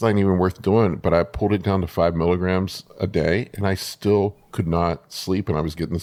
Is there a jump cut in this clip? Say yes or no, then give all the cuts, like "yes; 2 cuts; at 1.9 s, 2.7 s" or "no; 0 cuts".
no; 0 cuts